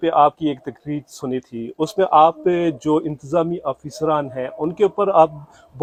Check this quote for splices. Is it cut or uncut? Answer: uncut